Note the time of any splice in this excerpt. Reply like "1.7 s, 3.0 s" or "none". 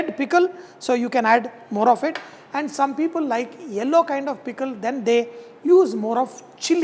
none